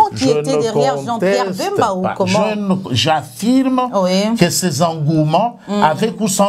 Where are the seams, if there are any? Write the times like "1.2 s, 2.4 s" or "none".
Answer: none